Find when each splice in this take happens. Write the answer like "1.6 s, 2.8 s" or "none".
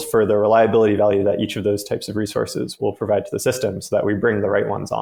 none